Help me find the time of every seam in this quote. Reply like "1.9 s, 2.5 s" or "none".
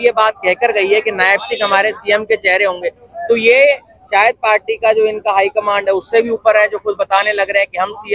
none